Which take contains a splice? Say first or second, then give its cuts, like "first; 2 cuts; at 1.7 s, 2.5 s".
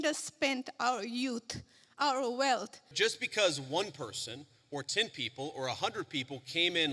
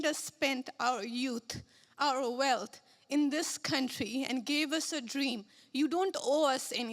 first; 1 cut; at 2.9 s